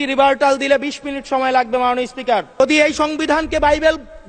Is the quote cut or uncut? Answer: cut